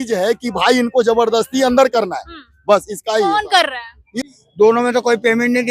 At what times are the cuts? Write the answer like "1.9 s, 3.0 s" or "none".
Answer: 4.1 s